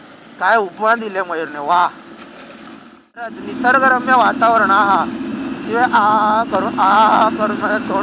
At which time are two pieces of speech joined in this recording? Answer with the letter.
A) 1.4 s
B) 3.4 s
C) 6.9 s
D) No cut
B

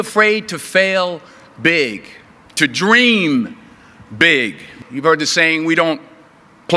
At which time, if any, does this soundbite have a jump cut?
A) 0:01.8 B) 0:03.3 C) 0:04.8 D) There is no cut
C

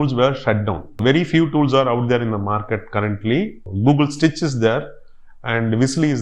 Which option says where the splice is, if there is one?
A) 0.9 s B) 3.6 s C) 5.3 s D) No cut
D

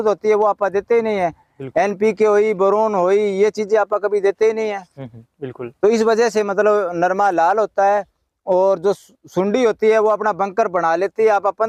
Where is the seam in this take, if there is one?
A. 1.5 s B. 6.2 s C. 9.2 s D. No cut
D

